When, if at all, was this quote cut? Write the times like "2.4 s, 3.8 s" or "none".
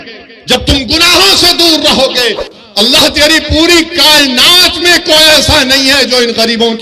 2.5 s